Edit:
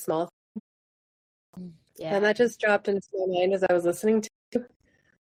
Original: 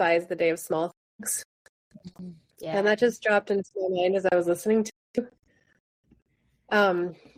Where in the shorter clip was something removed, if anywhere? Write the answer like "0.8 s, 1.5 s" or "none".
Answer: none